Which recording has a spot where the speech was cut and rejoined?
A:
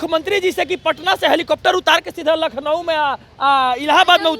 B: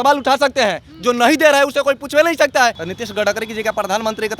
B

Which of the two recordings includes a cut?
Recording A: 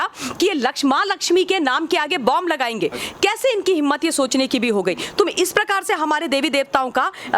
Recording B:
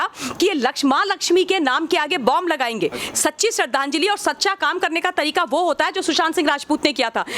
B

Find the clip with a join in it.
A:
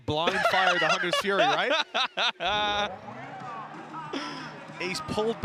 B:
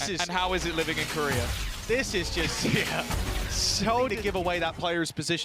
B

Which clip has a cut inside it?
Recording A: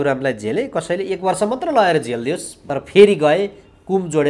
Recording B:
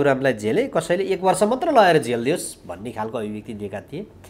A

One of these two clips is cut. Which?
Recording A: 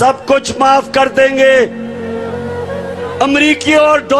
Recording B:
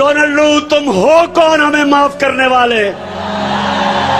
A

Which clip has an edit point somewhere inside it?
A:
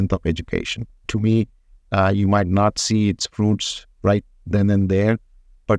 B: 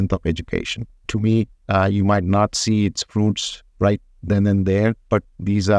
B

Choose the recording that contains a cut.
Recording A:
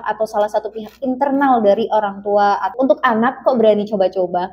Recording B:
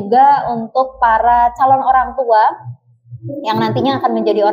A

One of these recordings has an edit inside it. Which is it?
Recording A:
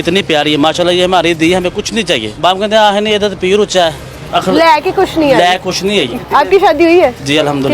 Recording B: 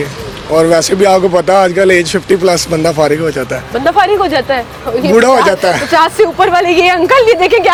A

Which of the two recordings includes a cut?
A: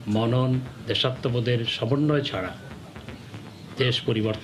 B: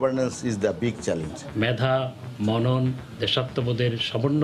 B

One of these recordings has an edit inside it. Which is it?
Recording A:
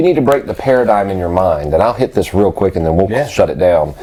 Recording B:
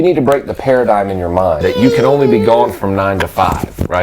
B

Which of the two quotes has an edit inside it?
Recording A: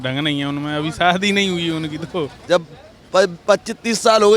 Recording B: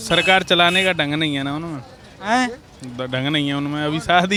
A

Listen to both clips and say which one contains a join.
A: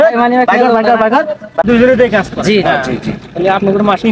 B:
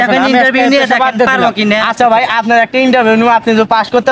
A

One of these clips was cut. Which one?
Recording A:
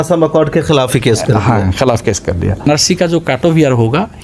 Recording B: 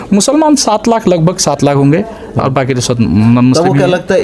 A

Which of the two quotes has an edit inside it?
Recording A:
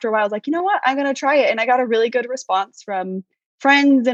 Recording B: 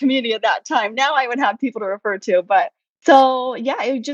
B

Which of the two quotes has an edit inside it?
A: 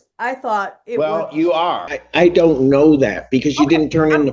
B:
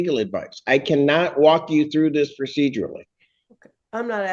A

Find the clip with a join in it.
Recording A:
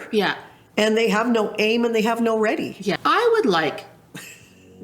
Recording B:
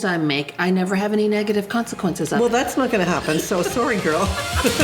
A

